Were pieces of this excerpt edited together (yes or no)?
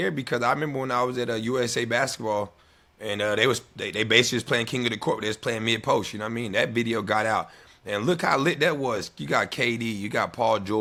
no